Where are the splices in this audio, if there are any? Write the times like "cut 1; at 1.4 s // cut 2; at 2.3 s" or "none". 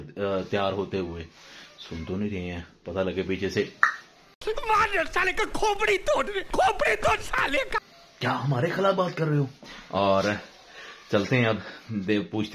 none